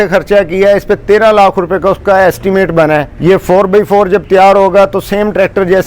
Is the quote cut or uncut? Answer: cut